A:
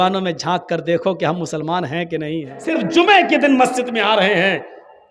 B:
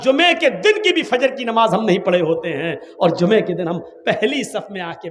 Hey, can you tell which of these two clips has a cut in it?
A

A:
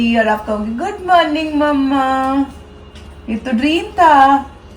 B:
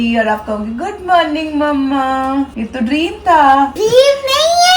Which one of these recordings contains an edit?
B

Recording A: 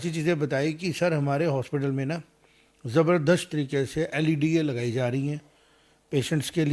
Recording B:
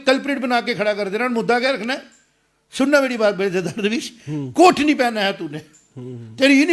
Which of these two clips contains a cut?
A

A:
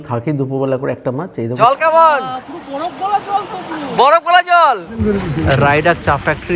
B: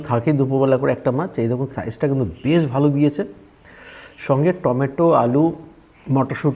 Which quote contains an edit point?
A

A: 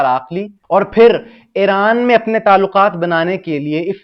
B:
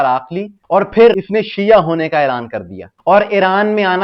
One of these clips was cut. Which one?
B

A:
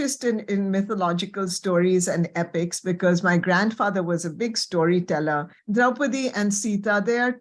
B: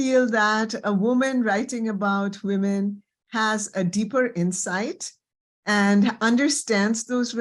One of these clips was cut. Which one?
A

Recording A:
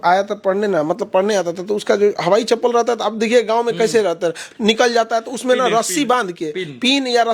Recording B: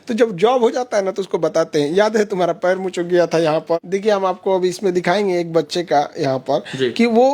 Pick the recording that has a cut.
B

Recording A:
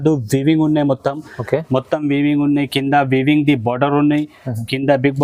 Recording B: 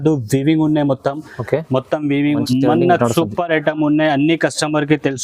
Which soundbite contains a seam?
B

